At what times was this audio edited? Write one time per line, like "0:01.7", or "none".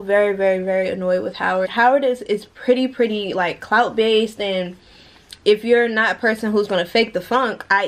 0:01.7